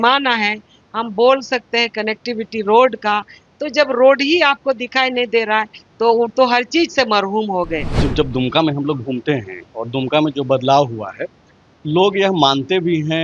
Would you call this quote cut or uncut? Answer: cut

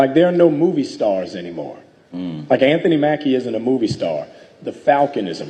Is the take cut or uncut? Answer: uncut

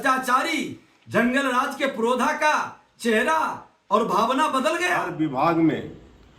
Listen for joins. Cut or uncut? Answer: cut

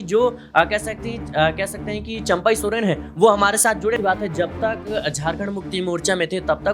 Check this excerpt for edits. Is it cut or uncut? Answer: cut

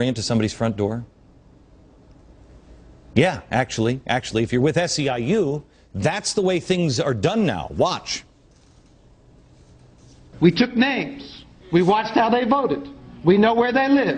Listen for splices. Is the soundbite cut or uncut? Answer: uncut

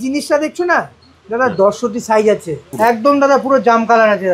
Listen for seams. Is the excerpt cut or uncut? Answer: cut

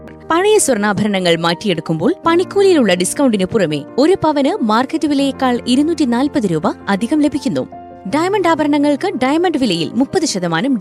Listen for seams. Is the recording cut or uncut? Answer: uncut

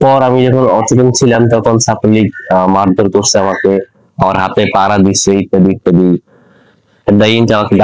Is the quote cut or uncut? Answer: uncut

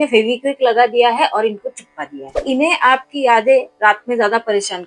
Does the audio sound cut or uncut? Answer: cut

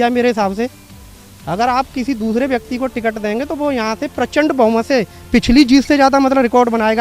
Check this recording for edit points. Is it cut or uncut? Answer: uncut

